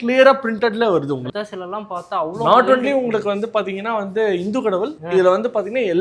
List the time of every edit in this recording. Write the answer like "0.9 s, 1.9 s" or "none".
1.3 s